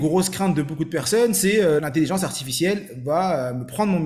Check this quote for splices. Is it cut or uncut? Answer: cut